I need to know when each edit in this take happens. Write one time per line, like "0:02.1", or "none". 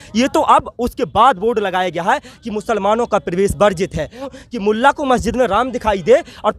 0:04.3